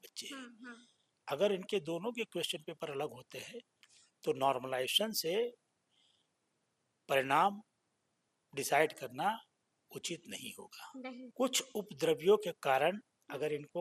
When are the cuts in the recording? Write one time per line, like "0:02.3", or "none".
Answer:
0:11.3